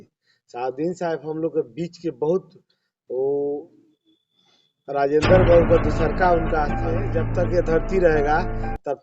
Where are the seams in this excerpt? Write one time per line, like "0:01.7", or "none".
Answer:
0:07.2